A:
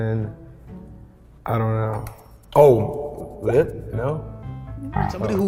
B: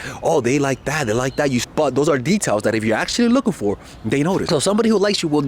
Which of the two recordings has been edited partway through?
B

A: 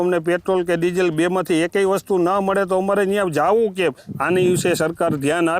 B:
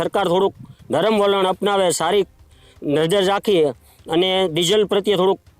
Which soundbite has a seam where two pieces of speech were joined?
A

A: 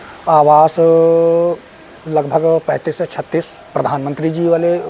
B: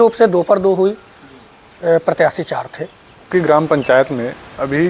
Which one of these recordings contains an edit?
B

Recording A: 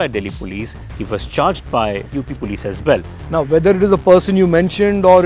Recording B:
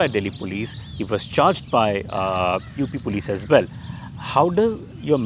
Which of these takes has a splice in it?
A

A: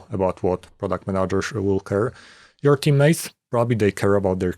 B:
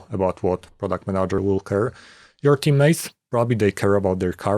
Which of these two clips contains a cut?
B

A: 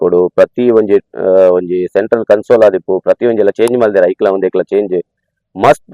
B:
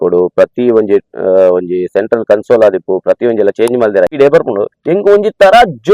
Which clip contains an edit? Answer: B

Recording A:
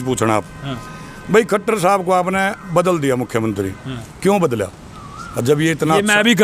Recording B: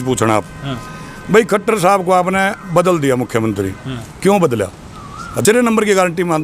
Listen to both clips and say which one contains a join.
B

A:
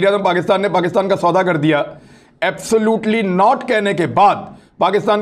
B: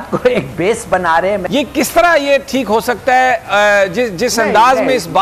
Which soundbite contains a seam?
B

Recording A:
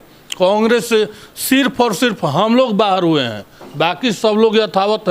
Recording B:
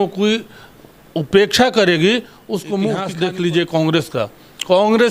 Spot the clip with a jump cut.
B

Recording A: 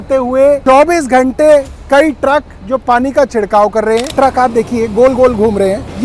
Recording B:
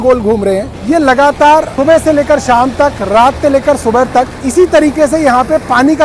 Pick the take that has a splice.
A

